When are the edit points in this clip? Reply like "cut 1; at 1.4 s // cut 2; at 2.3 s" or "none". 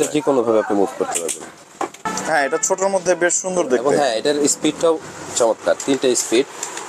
cut 1; at 2.1 s